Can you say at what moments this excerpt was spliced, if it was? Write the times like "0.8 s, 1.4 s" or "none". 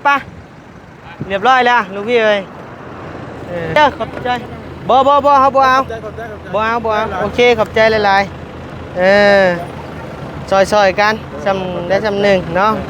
3.8 s

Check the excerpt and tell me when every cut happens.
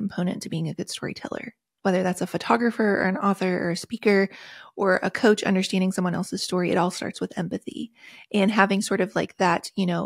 none

